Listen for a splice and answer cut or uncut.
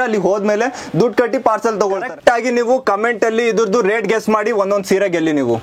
cut